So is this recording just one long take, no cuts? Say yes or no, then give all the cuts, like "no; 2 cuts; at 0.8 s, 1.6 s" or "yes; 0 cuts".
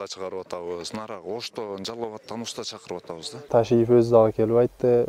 no; 1 cut; at 3.5 s